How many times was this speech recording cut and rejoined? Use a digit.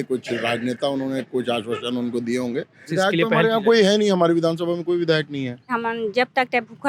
2